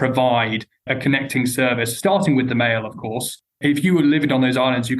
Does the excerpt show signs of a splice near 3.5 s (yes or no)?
yes